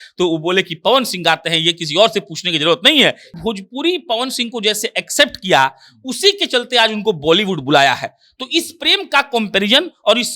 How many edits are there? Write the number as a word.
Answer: one